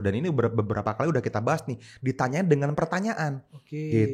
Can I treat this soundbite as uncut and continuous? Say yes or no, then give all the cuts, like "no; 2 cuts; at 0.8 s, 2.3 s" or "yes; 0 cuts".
yes; 0 cuts